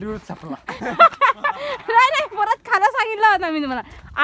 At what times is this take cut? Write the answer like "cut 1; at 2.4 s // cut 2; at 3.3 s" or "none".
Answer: none